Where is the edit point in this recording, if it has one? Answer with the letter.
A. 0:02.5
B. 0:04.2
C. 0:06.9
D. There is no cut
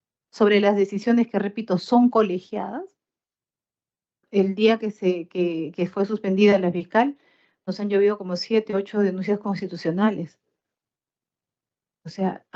B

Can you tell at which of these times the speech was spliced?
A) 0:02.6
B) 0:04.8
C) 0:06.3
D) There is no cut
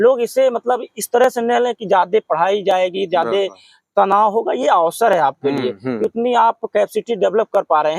D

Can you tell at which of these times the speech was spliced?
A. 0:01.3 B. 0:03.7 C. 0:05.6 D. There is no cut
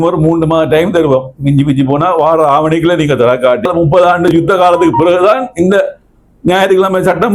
B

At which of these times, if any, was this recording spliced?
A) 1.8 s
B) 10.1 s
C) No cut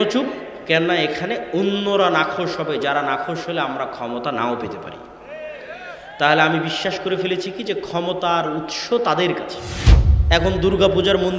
B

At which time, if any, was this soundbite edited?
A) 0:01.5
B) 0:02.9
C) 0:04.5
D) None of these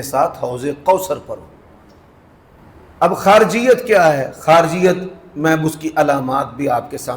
B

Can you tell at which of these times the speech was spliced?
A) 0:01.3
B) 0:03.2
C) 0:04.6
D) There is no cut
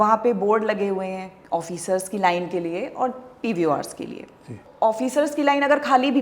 C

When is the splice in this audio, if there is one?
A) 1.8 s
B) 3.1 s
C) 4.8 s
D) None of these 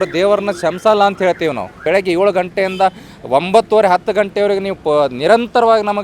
A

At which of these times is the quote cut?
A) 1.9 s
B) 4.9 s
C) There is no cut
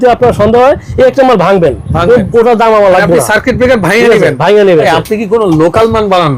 B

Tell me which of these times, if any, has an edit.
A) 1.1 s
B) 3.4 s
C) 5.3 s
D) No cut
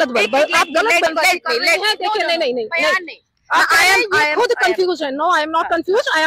A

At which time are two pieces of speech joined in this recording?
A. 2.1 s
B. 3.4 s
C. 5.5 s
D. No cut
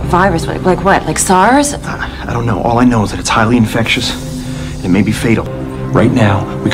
C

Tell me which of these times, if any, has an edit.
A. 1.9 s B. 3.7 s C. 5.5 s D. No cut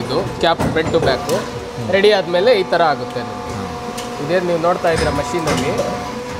D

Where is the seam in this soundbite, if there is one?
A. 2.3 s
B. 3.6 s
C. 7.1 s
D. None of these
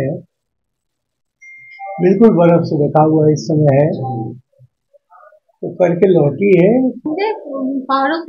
C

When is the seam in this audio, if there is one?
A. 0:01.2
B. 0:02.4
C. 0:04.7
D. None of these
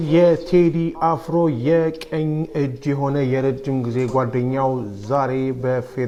D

